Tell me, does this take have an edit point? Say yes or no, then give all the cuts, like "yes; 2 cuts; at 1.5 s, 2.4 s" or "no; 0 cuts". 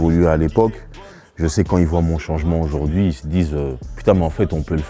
no; 0 cuts